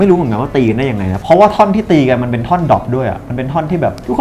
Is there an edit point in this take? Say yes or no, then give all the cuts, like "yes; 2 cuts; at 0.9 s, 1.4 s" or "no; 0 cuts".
no; 0 cuts